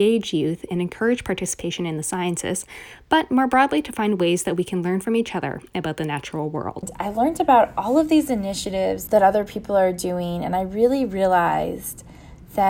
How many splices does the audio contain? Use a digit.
2